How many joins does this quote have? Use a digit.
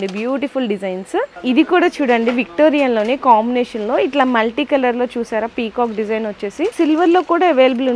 2